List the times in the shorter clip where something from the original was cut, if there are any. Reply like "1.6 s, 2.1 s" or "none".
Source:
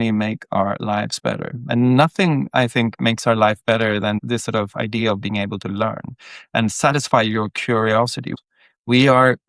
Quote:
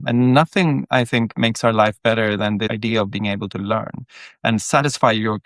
2.6 s